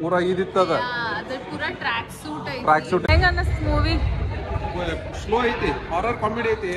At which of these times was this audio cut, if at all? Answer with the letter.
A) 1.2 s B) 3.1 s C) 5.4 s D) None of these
B